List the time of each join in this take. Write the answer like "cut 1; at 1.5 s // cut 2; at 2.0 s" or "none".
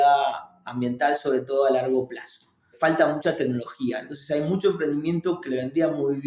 cut 1; at 2.7 s